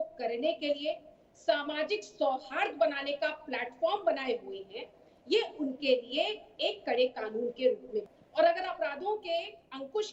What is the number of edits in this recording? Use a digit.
1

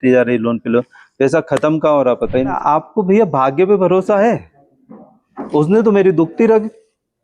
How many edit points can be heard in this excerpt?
1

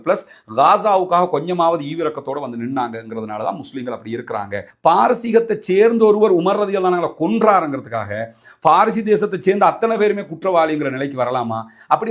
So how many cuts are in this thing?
1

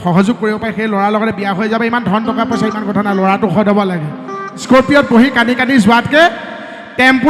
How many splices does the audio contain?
1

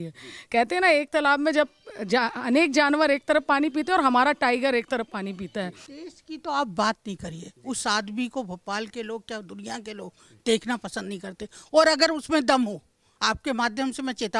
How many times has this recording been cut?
1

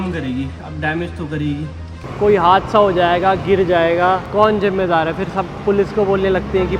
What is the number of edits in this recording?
2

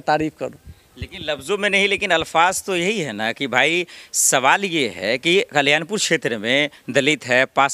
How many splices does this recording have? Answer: 0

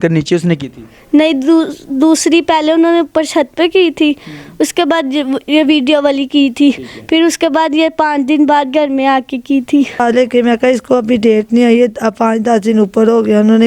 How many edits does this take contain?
1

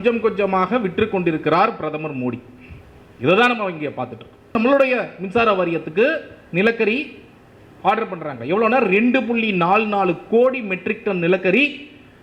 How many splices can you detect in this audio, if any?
1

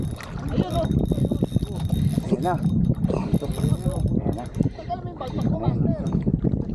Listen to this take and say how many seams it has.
0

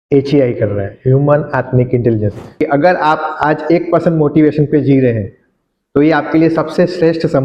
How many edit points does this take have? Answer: 1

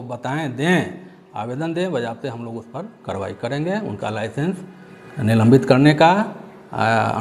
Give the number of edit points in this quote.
0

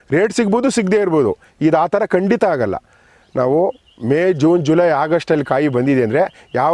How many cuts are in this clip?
0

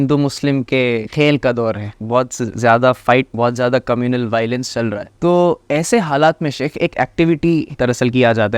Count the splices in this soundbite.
5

